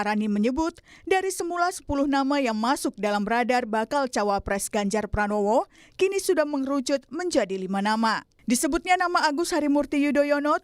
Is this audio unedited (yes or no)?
no